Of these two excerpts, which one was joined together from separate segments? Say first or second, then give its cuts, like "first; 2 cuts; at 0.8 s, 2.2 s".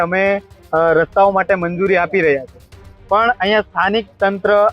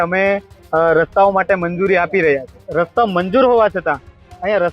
second; 1 cut; at 2.6 s